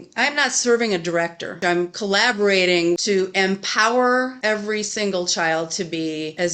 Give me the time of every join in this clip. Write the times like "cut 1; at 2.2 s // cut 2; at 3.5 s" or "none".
cut 1; at 1.5 s // cut 2; at 3.0 s // cut 3; at 4.3 s